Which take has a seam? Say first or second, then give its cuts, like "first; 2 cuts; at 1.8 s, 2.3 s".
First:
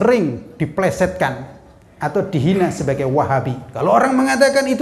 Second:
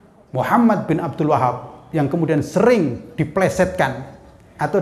first; 1 cut; at 3.6 s